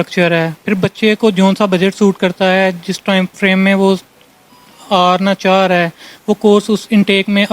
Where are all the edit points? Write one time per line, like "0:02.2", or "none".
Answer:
none